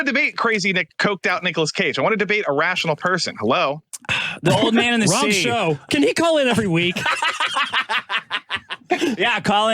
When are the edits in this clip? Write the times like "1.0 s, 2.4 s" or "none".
0.9 s, 5.8 s